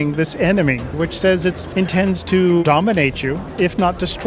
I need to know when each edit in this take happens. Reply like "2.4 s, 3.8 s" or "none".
0.9 s, 1.6 s, 3.0 s